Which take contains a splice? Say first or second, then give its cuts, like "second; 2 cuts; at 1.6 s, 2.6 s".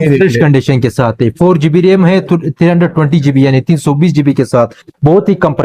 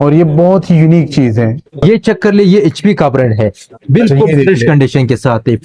second; 1 cut; at 1.8 s